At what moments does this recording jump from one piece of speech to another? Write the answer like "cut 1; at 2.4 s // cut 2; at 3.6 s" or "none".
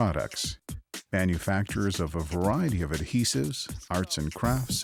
none

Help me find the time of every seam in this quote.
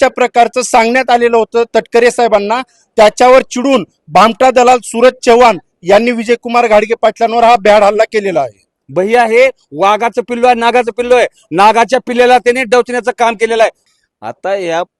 cut 1; at 8.8 s // cut 2; at 13.8 s

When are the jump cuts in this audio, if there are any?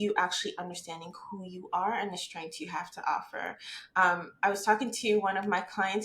none

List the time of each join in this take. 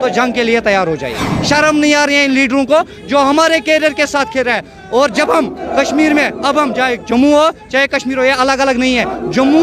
cut 1; at 1.3 s

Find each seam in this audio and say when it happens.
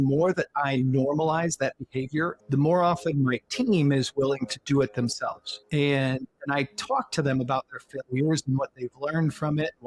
cut 1; at 2.4 s

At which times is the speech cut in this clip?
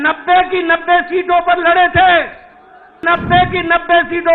cut 1; at 3.0 s

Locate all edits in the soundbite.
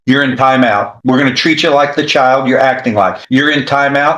cut 1; at 0.9 s // cut 2; at 3.2 s

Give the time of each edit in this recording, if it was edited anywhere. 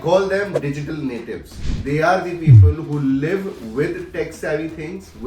cut 1; at 1.5 s

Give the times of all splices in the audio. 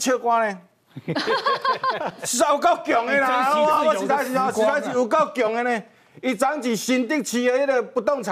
none

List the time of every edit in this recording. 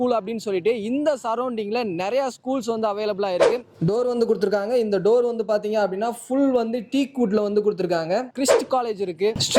cut 1; at 3.7 s // cut 2; at 8.3 s

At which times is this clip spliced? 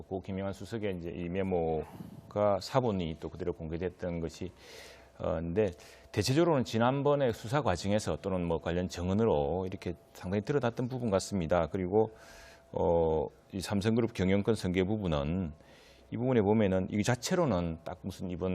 cut 1; at 1.0 s

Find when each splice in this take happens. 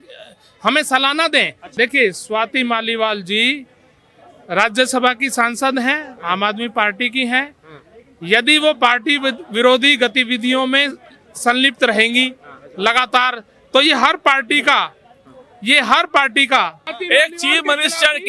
cut 1; at 1.6 s // cut 2; at 16.9 s

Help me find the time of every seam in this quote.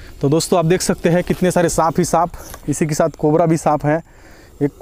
none

